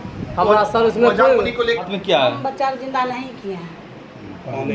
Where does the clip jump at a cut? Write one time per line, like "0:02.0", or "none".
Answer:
0:01.8